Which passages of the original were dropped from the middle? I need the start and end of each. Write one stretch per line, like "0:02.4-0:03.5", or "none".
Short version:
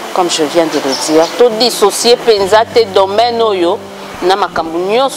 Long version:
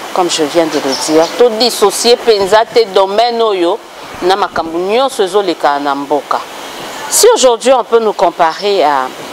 none